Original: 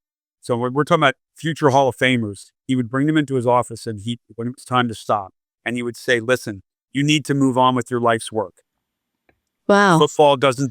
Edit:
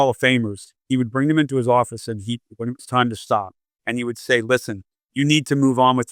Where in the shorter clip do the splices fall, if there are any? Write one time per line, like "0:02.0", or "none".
none